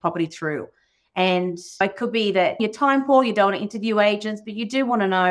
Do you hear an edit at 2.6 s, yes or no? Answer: yes